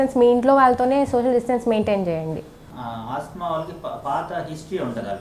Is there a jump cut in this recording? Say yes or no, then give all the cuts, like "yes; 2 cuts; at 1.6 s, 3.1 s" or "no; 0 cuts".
yes; 1 cut; at 2.6 s